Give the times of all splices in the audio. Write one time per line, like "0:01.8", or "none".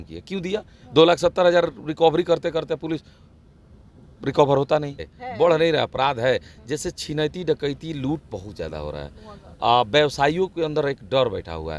0:05.2